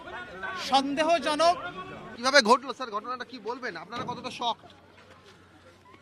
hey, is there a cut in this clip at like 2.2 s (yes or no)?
yes